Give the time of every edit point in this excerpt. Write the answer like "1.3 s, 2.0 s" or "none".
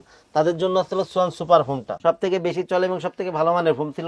1.9 s